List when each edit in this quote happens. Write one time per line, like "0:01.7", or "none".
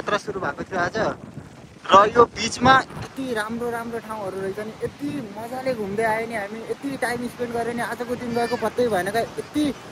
none

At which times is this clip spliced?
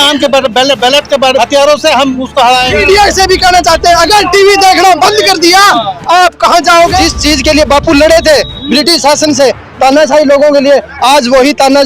0:01.4
0:02.7
0:07.0

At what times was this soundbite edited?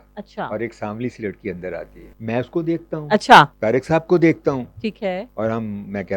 0:02.1
0:03.5
0:05.3

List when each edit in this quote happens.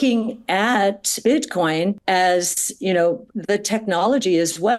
0:01.2

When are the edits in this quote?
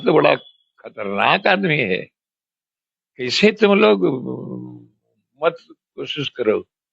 none

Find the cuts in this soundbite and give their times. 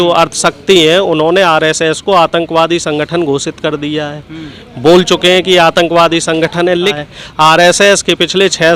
0:06.9

